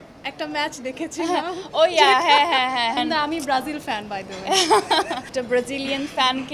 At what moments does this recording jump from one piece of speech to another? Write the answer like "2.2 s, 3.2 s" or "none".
3.0 s, 5.4 s